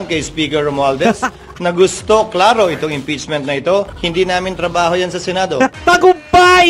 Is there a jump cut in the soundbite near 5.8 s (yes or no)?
yes